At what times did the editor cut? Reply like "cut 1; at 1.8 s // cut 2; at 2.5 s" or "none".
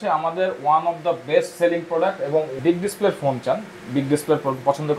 cut 1; at 2.5 s